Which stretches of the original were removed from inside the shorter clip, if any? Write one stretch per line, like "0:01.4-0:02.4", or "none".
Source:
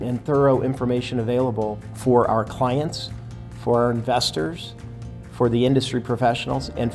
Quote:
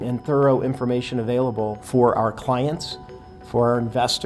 0:01.8-0:01.9